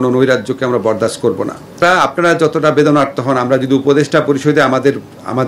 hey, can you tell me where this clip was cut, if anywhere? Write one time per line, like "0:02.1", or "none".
0:01.8